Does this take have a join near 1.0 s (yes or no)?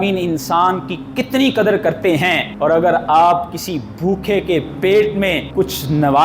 no